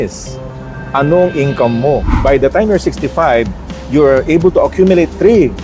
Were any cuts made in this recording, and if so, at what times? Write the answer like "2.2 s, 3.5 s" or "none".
2.1 s